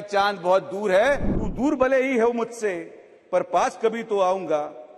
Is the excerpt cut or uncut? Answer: cut